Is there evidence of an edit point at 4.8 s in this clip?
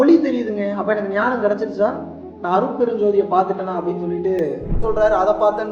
yes; 1 cut; at 4.8 s

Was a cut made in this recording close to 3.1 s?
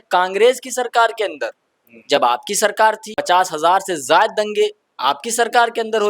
yes; 1 cut; at 3.1 s

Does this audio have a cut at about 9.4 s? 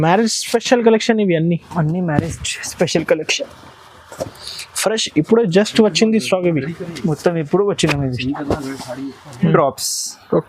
yes; 1 cut; at 9.4 s

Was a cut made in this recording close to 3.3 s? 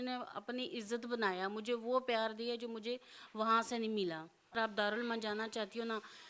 no; 1 cut; at 4.6 s

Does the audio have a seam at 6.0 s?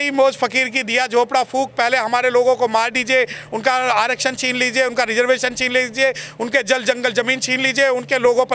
no; 0 cuts

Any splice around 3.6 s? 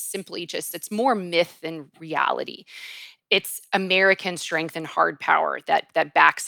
no; 1 cut; at 1.9 s

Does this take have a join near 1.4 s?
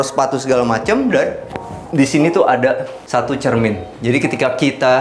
no; 1 cut; at 2.9 s

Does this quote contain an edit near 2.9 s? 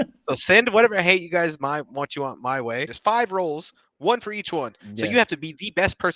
yes; 1 cut; at 2.9 s

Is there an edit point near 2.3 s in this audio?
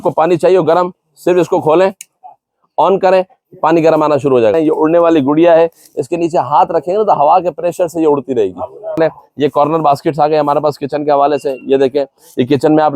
no; 2 cuts; at 4.5 s, 9.0 s

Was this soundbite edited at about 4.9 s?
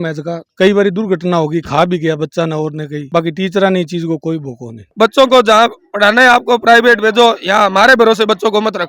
yes; 1 cut; at 4.9 s

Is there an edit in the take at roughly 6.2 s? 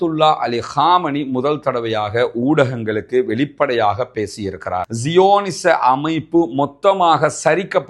no; 1 cut; at 4.9 s

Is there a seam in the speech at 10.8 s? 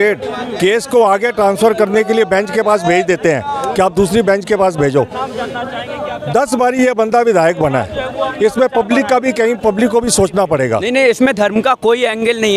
yes; 1 cut; at 10.8 s

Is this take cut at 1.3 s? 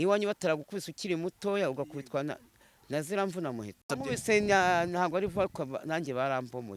no; 1 cut; at 3.9 s

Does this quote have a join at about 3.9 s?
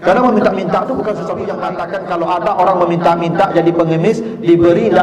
no; 1 cut; at 1.7 s

